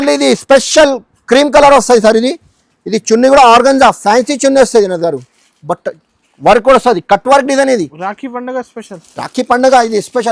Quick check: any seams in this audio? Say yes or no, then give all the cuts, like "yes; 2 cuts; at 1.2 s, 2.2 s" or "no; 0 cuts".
no; 0 cuts